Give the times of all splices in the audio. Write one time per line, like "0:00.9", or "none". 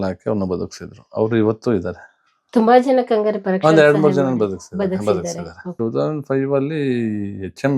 0:05.7